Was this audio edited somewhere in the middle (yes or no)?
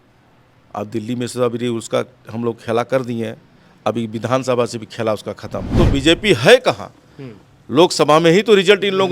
yes